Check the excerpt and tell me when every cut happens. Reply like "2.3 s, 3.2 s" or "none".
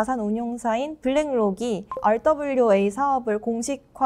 1.9 s